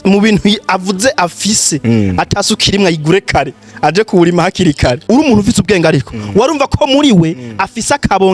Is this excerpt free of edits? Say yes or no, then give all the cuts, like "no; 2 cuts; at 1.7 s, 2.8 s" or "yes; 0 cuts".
no; 1 cut; at 5.0 s